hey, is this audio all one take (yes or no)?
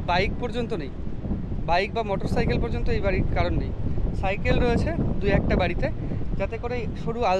yes